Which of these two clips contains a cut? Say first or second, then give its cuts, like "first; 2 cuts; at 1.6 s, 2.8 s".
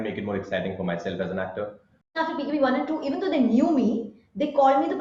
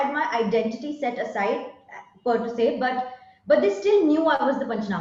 first; 1 cut; at 2.2 s